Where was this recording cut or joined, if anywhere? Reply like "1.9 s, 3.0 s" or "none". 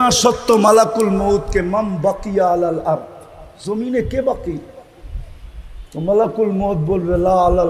none

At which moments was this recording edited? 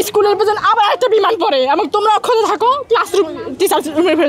none

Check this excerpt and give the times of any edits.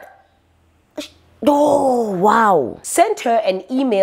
2.8 s

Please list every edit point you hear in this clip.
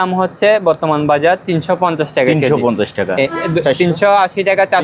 3.3 s

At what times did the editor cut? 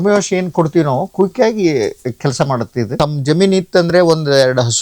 2.9 s

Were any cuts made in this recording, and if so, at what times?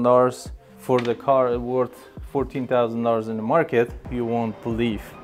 4.0 s

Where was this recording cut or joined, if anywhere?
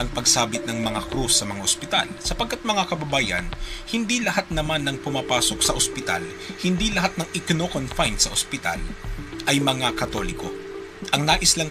1.6 s

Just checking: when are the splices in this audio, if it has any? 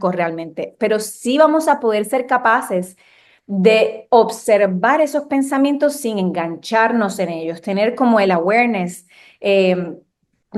none

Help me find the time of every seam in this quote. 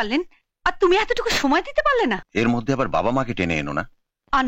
2.2 s

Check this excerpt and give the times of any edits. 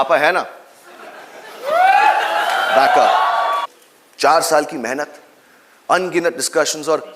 3.6 s

